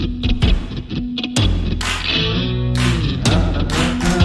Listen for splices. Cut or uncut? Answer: uncut